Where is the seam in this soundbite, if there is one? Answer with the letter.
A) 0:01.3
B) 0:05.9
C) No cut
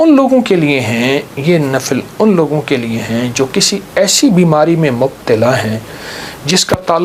C